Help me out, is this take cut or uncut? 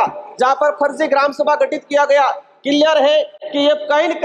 uncut